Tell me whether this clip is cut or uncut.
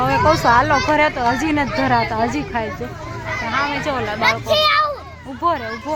uncut